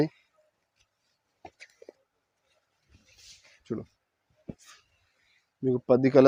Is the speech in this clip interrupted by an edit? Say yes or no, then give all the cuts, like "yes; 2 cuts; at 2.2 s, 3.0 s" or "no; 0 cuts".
no; 0 cuts